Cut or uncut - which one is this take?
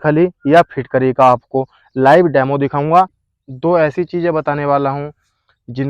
cut